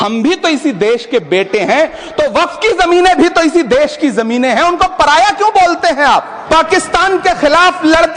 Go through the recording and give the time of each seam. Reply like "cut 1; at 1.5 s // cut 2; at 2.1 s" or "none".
cut 1; at 6.4 s